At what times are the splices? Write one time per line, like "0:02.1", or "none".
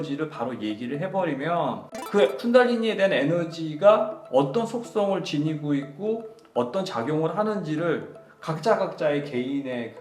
0:02.0